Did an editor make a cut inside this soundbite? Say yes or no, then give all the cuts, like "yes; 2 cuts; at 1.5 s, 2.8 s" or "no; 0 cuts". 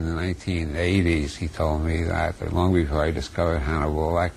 no; 0 cuts